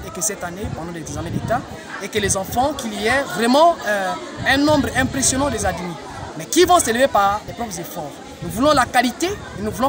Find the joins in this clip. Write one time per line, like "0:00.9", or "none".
none